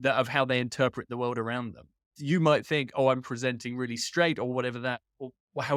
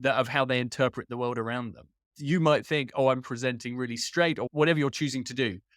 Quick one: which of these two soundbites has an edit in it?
second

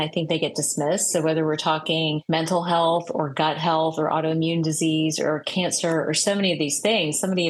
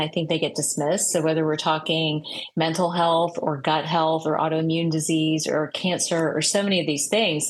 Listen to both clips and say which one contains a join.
first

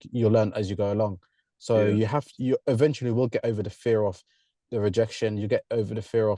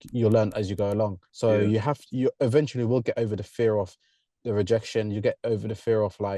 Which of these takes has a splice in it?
second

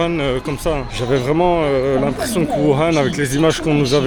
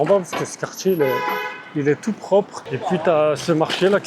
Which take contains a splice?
second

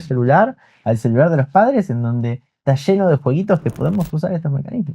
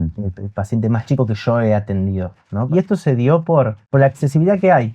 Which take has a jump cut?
second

